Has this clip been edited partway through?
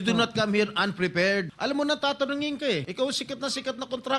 yes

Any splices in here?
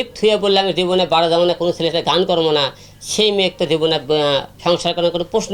no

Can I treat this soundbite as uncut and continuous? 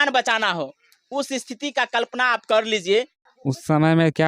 no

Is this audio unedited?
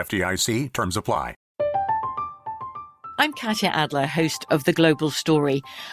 no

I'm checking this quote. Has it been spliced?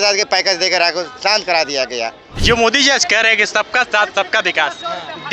yes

